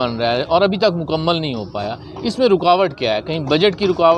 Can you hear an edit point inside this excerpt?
no; 0 cuts

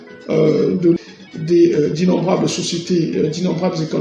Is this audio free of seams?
yes; 0 cuts

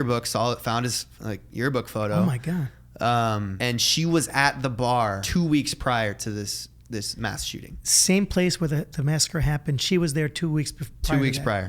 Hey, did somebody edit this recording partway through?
yes; 2 cuts; at 3.5 s, 5.2 s

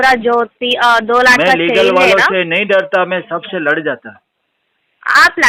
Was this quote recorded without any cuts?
yes; 0 cuts

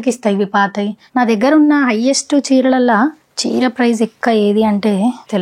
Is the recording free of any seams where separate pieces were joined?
no; 1 cut; at 1.0 s

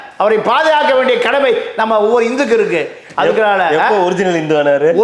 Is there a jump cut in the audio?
no; 0 cuts

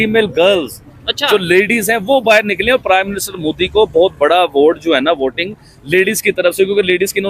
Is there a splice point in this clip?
no; 0 cuts

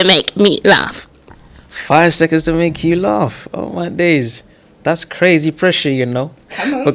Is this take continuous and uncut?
yes; 0 cuts

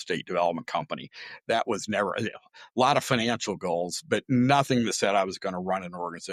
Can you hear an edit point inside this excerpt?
no; 0 cuts

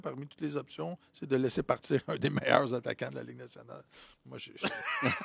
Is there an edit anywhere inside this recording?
no; 0 cuts

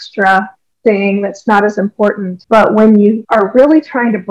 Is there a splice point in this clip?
yes; 2 cuts; at 2.3 s, 3.2 s

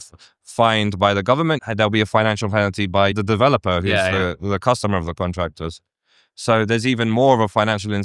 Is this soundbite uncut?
no; 2 cuts; at 1.6 s, 3.1 s

